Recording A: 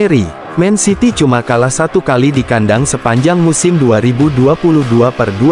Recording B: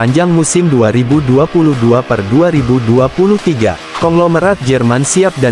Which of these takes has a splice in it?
B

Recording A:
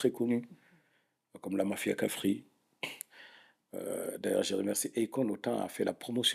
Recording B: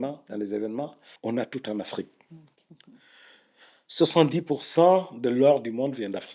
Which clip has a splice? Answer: B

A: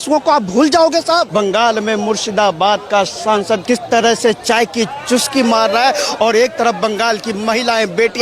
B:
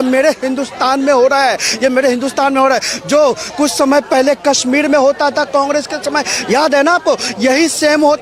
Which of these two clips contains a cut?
A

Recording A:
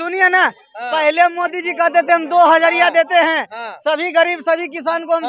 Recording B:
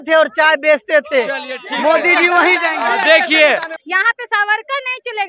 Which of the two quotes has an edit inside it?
B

